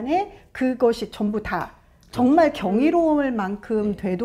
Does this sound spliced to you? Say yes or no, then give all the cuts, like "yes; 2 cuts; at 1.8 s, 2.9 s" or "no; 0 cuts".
no; 0 cuts